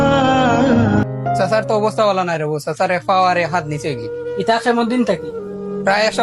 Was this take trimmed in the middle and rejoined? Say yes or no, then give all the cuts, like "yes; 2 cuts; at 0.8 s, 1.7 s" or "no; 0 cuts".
yes; 1 cut; at 1.0 s